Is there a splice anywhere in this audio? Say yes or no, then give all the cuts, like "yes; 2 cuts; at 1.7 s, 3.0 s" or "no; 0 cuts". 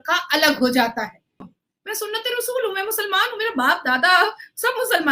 yes; 1 cut; at 1.5 s